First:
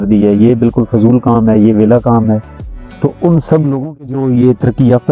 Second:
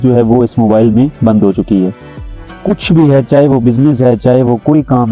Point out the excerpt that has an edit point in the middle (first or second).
first